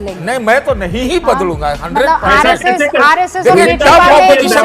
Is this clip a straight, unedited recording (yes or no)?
yes